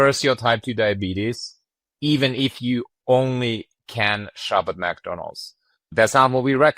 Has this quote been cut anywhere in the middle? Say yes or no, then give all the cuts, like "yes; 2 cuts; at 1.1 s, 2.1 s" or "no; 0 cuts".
yes; 1 cut; at 1.8 s